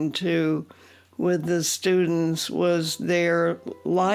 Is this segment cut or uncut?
uncut